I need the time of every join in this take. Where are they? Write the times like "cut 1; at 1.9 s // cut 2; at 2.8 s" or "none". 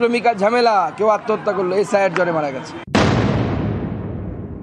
cut 1; at 2.9 s